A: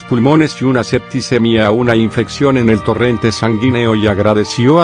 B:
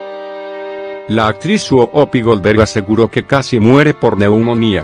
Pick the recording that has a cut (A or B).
B